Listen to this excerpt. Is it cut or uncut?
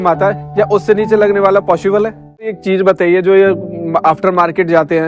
cut